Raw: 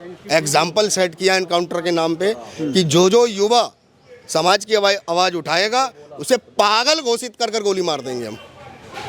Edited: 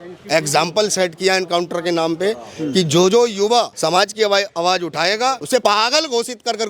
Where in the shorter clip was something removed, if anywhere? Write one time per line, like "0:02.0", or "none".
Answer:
0:03.7
0:05.5